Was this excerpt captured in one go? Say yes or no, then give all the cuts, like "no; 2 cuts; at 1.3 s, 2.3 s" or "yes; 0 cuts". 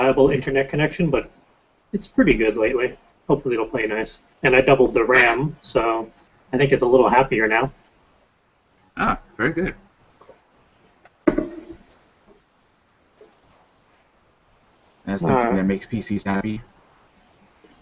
no; 1 cut; at 3.7 s